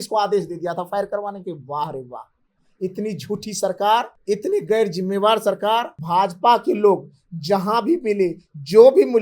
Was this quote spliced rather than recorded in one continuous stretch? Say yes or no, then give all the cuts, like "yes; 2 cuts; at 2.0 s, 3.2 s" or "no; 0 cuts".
yes; 2 cuts; at 4.1 s, 6.0 s